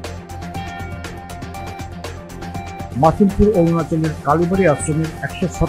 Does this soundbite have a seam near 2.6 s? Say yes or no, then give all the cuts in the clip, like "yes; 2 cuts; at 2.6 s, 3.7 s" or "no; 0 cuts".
yes; 1 cut; at 2.6 s